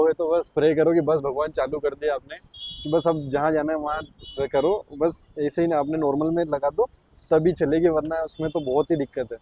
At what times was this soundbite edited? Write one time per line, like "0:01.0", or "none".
none